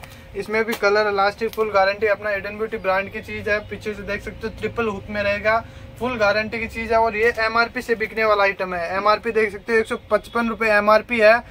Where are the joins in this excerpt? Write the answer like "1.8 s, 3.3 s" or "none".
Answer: none